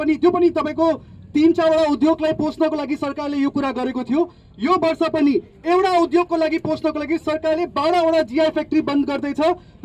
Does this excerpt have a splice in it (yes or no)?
no